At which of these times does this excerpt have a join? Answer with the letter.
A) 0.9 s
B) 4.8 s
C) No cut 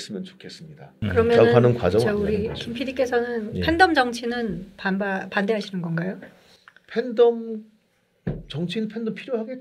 A